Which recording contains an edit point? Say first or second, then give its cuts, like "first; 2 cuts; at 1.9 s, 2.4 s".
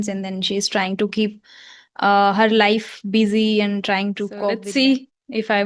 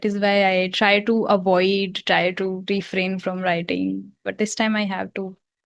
first; 1 cut; at 4.5 s